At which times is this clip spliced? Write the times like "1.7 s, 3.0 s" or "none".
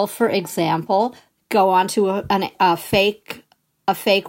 none